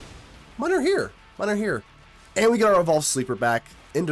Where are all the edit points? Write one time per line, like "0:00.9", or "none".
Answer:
none